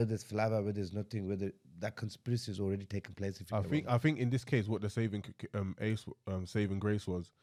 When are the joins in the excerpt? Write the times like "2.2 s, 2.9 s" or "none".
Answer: none